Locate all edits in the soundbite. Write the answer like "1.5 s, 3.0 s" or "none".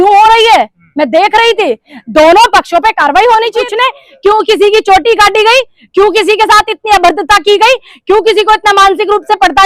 3.7 s